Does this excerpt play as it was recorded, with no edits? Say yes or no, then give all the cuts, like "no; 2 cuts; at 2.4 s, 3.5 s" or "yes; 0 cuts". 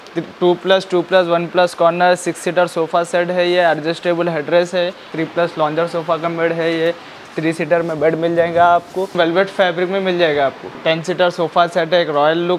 no; 3 cuts; at 5.1 s, 9.1 s, 10.7 s